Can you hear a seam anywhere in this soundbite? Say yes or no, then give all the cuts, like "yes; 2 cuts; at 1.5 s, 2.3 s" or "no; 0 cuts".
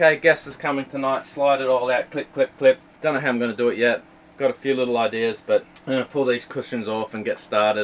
yes; 2 cuts; at 2.9 s, 5.7 s